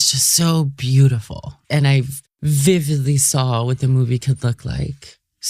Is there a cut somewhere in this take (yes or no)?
yes